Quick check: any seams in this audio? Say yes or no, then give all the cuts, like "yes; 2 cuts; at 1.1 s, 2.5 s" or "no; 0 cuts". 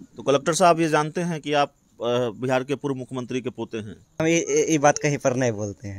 yes; 1 cut; at 4.2 s